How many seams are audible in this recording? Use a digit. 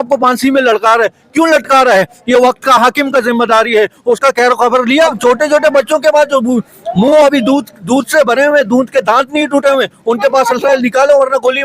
1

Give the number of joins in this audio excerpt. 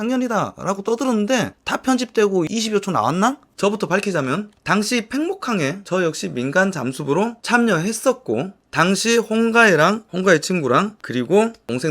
1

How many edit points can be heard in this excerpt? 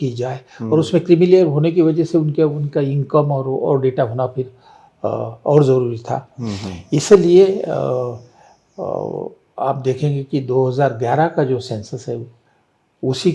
0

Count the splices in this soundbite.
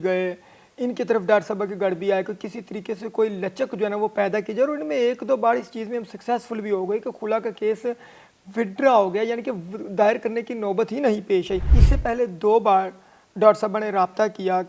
1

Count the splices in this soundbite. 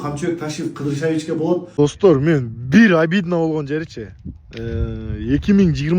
1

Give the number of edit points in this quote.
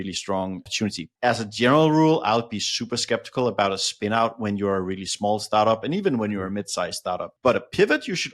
1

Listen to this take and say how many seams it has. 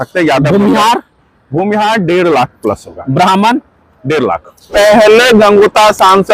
1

